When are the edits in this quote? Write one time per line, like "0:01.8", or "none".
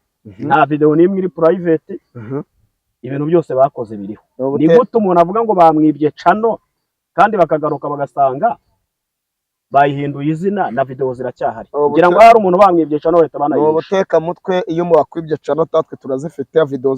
none